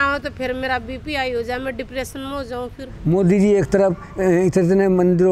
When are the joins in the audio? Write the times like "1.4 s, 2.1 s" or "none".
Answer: 2.9 s